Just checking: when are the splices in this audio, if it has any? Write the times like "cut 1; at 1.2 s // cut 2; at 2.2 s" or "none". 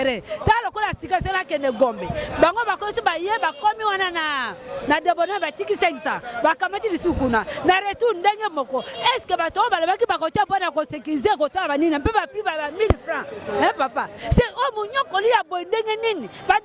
none